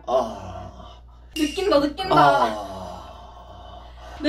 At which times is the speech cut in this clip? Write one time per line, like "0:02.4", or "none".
none